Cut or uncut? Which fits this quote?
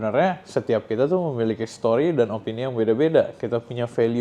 uncut